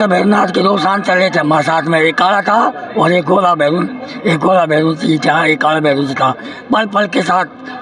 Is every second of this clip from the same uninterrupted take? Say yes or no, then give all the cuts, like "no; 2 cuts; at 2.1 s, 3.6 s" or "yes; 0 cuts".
yes; 0 cuts